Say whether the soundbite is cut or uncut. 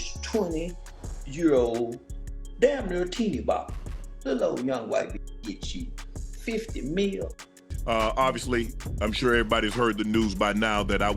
cut